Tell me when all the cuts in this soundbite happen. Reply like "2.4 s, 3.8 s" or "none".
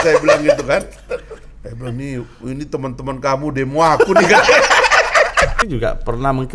5.6 s